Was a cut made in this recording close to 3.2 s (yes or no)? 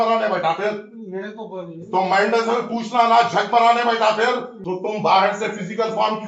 no